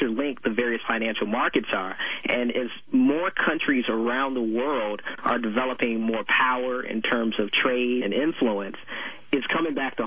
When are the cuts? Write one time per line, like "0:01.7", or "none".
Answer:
none